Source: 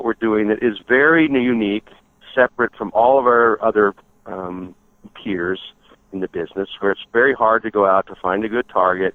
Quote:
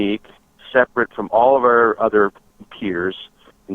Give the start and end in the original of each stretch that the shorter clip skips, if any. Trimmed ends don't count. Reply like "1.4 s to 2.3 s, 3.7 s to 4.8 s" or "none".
4.1 s to 5.0 s